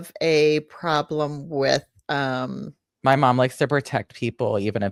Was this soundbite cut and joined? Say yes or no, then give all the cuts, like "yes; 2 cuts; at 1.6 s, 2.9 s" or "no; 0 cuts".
no; 0 cuts